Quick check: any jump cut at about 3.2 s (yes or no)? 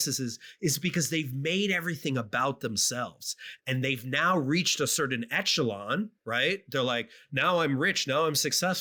no